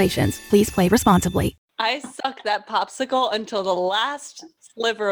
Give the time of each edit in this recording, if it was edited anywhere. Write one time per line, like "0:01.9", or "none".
0:01.7